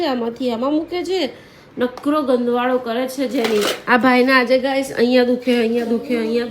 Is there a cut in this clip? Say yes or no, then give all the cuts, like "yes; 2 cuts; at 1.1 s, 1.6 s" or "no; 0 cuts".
yes; 1 cut; at 3.8 s